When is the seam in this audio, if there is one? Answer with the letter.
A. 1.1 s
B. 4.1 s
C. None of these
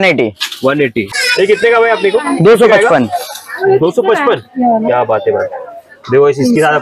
A